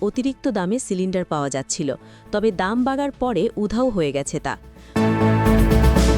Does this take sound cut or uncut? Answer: cut